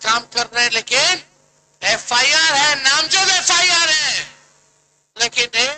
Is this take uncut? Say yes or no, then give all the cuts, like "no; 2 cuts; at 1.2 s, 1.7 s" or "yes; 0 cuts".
yes; 0 cuts